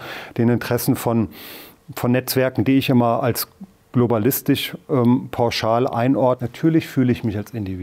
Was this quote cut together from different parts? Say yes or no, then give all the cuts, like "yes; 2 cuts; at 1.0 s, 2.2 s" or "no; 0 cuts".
yes; 1 cut; at 6.4 s